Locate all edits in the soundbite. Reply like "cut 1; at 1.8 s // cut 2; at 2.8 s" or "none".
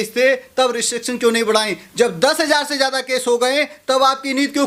none